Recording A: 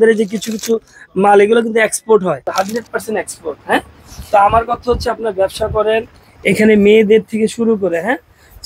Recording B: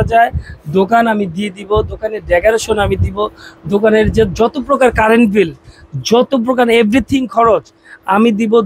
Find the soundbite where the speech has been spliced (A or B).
A